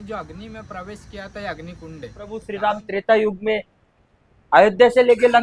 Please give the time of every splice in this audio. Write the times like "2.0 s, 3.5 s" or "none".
2.4 s